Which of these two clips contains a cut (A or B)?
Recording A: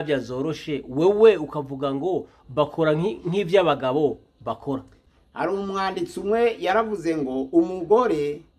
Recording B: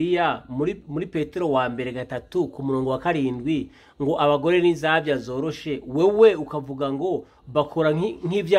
A